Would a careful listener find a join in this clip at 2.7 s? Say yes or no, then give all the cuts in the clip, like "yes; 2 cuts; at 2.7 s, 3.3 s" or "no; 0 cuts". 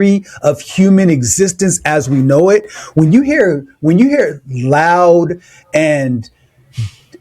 no; 0 cuts